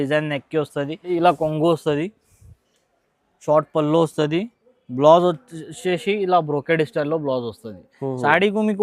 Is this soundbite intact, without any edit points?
no; 1 cut; at 1.1 s

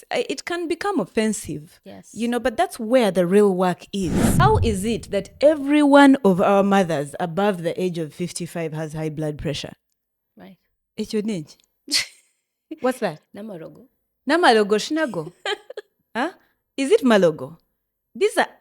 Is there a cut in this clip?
yes; 1 cut; at 4.2 s

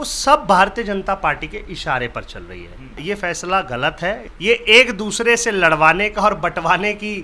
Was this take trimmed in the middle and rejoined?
yes; 2 cuts; at 3.0 s, 4.3 s

